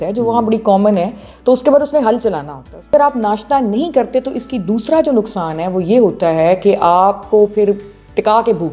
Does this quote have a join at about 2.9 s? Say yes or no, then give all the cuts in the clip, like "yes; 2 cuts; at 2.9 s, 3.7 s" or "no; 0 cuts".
yes; 1 cut; at 2.9 s